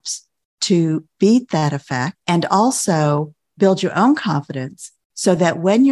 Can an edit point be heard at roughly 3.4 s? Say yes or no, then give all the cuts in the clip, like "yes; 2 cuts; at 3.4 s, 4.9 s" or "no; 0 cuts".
yes; 2 cuts; at 2.1 s, 3.4 s